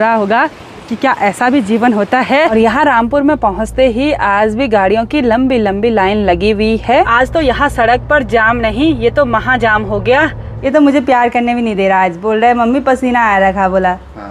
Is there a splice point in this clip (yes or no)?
yes